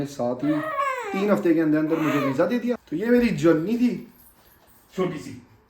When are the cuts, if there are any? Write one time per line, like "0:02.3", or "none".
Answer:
0:02.9